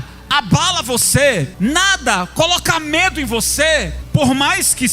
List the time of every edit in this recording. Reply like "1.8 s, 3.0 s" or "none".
1.5 s, 4.0 s